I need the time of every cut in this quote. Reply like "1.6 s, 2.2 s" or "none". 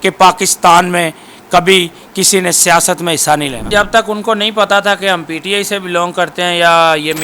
3.7 s